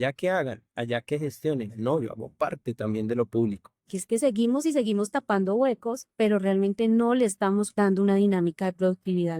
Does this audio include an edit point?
yes; 3 cuts; at 3.9 s, 6.0 s, 7.7 s

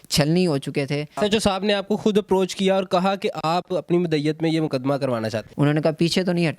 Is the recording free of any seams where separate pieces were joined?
no; 2 cuts; at 1.2 s, 5.4 s

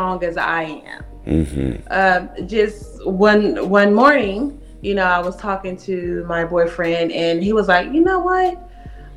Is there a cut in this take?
no; 0 cuts

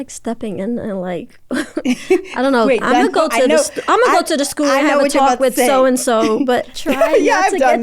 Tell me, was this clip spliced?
yes; 1 cut; at 6.8 s

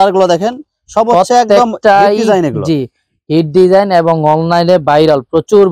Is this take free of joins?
yes; 0 cuts

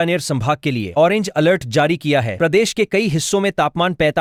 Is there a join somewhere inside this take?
no; 0 cuts

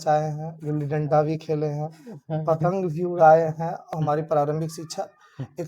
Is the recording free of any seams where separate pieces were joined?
no; 1 cut; at 3.7 s

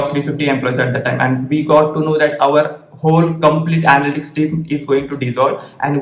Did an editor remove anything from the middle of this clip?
no; 0 cuts

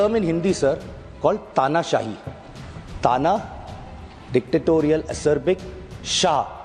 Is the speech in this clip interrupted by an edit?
no; 0 cuts

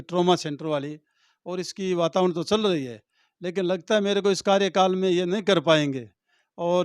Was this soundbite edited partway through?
no; 0 cuts

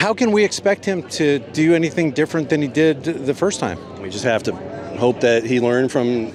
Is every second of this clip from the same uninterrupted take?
yes; 0 cuts

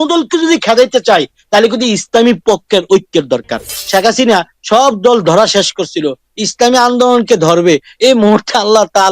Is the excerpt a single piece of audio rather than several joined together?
no; 1 cut; at 3.7 s

